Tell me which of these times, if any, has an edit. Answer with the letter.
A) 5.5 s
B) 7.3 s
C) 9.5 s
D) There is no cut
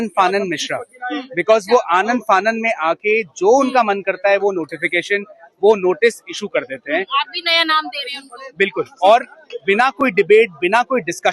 D